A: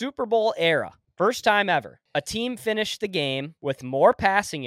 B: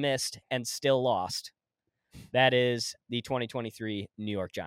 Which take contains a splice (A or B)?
A